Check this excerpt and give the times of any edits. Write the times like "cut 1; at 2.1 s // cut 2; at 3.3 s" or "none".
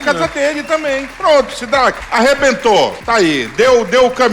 cut 1; at 1.1 s // cut 2; at 2.0 s // cut 3; at 3.0 s